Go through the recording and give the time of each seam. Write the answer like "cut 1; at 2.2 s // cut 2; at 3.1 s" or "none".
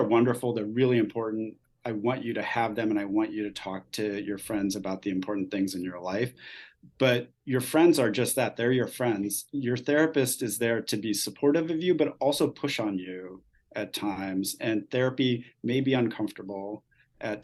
none